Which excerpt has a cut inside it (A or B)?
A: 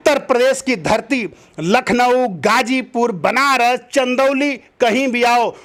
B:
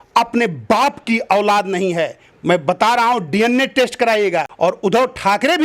B